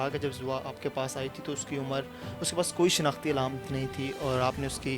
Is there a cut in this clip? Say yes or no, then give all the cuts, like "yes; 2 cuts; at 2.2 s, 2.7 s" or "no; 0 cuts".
no; 0 cuts